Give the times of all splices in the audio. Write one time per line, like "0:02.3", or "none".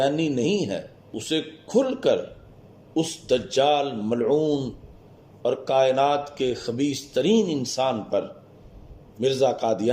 0:01.1